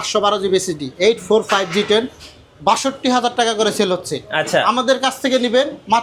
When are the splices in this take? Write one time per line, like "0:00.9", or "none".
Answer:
none